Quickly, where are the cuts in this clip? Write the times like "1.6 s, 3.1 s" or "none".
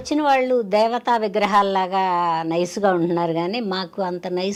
none